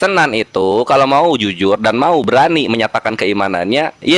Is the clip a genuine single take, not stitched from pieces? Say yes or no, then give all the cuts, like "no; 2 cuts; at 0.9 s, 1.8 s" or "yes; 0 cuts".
yes; 0 cuts